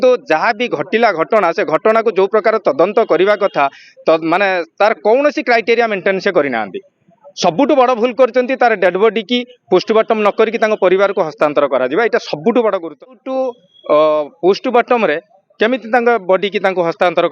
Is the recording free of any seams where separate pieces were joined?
no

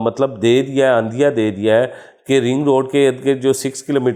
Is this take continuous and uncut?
yes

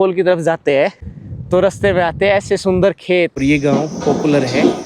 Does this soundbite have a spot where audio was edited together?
yes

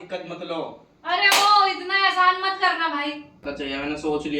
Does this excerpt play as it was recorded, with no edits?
no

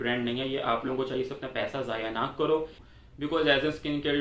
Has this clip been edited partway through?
yes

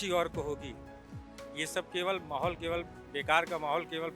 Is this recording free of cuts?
yes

